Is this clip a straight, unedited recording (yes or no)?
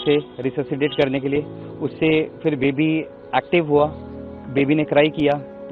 yes